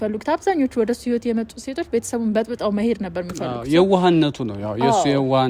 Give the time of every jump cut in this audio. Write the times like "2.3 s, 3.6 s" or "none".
none